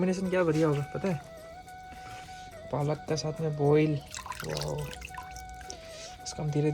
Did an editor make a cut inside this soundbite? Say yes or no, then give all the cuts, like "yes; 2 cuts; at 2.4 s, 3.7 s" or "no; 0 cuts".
no; 0 cuts